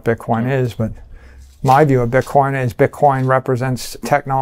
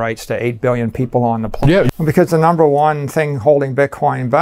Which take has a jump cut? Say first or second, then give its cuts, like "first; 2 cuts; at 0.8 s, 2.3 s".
second; 1 cut; at 1.9 s